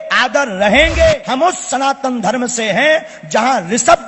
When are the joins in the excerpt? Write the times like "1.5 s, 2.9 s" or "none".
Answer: 1.2 s